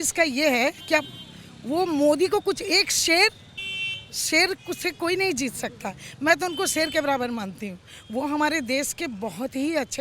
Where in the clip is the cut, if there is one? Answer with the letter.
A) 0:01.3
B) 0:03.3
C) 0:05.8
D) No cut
D